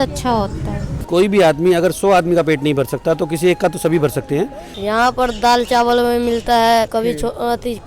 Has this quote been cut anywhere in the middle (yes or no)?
yes